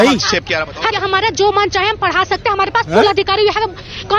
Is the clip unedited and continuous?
no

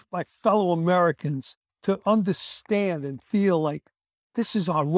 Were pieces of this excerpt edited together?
yes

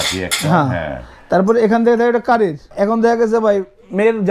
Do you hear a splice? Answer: yes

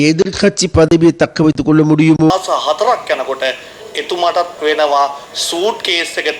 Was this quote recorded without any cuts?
no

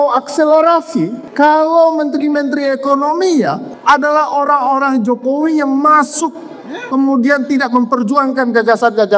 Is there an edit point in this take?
yes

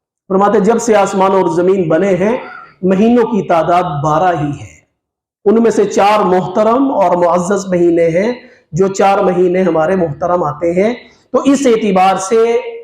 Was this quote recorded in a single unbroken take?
yes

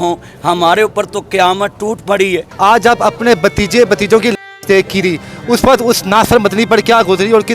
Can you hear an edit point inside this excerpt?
yes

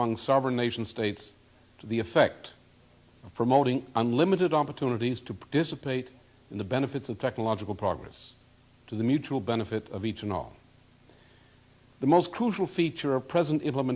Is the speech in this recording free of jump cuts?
yes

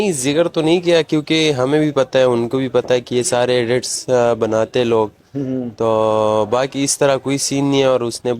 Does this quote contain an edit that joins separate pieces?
no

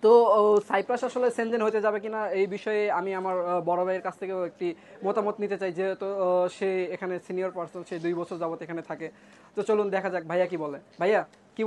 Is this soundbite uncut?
yes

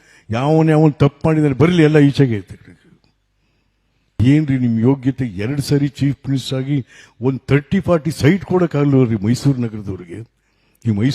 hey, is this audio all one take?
no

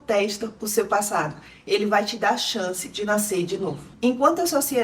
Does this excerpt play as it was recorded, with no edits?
no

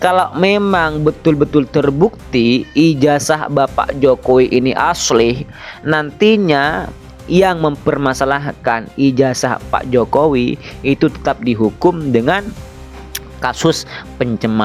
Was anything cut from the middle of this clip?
no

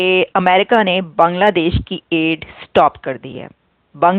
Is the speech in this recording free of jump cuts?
yes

